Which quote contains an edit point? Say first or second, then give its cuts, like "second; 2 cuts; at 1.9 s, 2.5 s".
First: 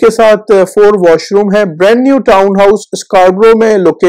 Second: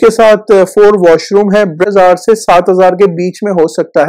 second; 1 cut; at 1.8 s